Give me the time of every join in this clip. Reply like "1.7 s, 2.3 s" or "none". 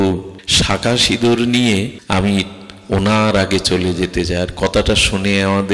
none